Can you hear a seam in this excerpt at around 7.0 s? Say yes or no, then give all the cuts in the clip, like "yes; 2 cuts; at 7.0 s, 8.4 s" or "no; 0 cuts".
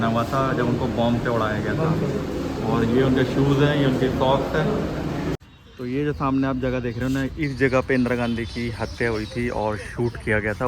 no; 1 cut; at 5.4 s